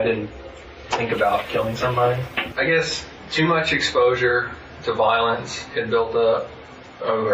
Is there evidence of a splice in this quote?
yes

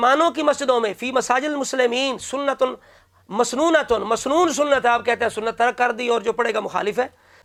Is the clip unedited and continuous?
yes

